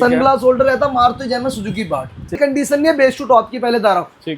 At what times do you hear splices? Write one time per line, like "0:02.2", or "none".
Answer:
0:02.4